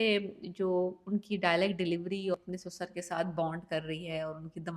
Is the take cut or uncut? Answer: cut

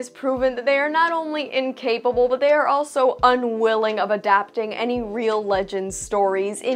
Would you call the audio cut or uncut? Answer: uncut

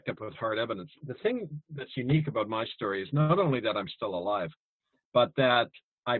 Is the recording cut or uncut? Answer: uncut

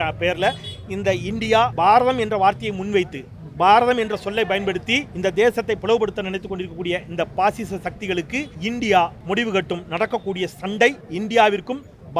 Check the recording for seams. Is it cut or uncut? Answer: cut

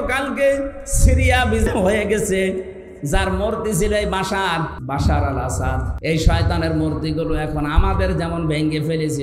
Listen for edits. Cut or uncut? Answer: cut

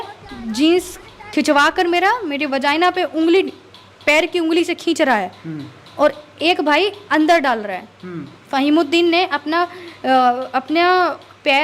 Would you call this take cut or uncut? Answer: uncut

